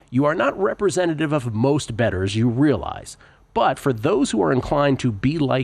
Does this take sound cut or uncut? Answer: uncut